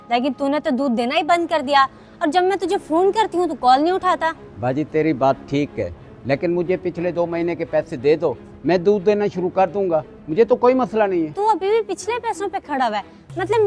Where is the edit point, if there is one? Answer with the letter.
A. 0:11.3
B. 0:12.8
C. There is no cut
A